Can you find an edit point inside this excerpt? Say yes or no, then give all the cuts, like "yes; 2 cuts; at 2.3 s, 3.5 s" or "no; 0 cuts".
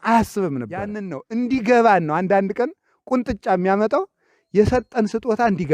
yes; 1 cut; at 1.1 s